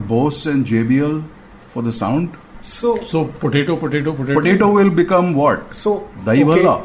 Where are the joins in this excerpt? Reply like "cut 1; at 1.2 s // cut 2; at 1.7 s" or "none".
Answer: none